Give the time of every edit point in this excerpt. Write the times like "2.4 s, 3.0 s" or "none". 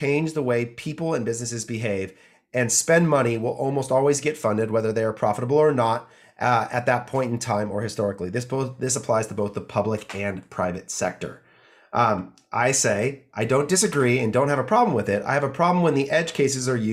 none

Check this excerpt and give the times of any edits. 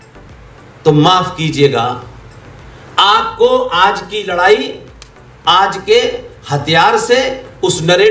none

